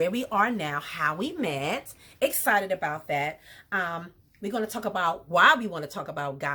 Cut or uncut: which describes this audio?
uncut